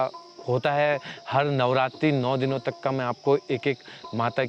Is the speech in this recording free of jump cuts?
yes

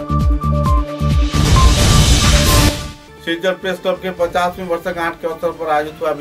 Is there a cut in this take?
yes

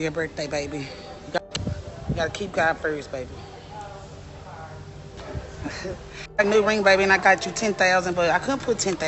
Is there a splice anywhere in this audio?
yes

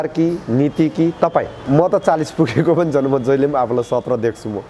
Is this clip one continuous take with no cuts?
no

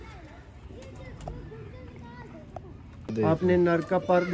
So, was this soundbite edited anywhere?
yes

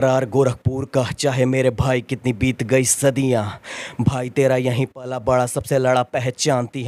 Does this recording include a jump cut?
no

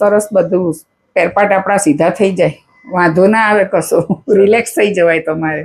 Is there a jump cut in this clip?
no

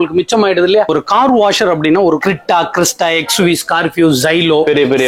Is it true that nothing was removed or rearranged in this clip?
no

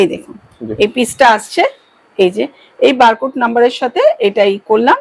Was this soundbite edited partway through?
no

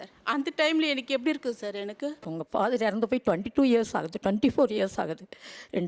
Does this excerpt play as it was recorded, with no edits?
no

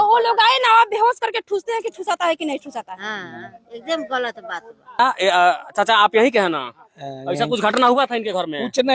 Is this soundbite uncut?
yes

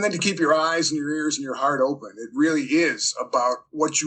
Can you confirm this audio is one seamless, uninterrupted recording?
yes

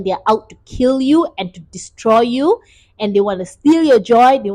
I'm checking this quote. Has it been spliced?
no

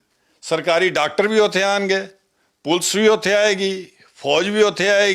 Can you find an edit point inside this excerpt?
no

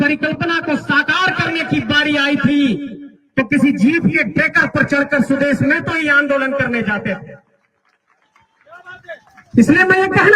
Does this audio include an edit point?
no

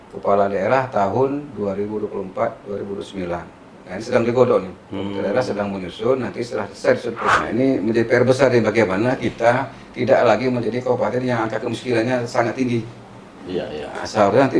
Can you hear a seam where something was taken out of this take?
yes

